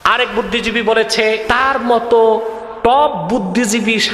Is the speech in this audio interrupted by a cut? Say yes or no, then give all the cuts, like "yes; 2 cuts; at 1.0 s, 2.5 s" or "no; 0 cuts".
yes; 1 cut; at 1.4 s